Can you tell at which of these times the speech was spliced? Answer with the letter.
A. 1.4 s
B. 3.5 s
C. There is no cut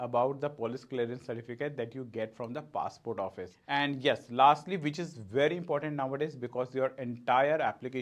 B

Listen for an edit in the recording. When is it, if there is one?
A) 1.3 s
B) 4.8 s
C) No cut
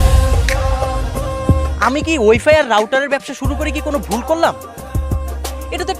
A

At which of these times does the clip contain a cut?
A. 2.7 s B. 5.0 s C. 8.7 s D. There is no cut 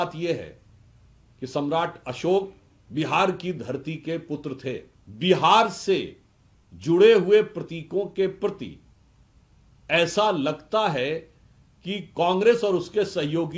B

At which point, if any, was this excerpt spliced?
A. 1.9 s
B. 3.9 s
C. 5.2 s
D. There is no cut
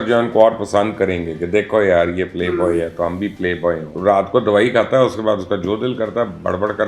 B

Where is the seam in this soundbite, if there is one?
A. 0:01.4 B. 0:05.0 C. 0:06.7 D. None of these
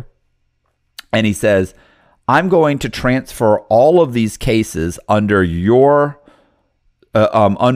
D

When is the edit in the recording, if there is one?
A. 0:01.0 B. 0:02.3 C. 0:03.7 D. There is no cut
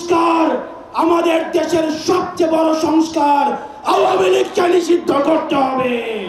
D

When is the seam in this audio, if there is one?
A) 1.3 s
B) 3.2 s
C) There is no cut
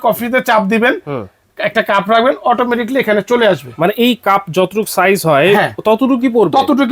C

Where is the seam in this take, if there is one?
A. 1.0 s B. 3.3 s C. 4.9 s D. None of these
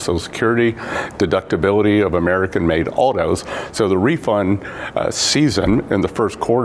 A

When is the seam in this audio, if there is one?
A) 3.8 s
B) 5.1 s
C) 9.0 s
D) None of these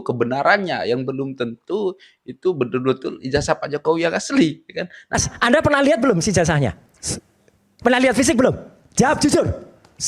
B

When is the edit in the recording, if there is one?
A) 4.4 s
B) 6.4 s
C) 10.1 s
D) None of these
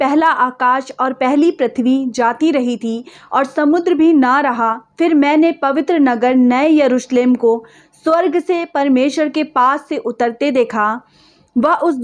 D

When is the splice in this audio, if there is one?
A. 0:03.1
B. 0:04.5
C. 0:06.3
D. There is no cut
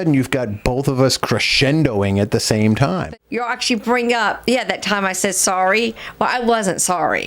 A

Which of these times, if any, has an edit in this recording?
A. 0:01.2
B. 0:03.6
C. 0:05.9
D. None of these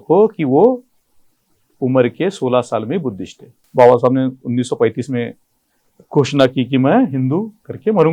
B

